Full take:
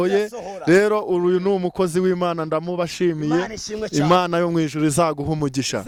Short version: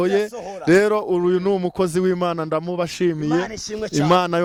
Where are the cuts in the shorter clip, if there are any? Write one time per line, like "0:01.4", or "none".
none